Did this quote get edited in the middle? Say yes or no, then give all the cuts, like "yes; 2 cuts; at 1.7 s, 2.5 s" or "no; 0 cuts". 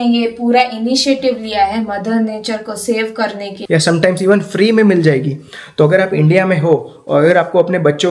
yes; 1 cut; at 3.5 s